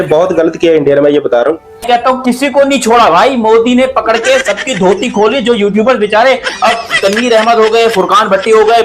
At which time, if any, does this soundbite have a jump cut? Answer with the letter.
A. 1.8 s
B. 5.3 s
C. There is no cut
A